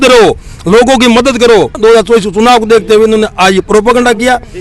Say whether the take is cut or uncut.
cut